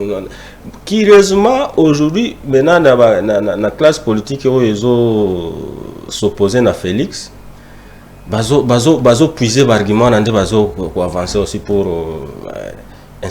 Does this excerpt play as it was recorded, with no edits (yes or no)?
yes